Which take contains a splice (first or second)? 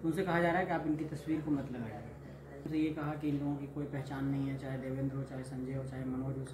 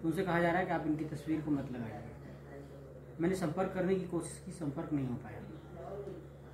first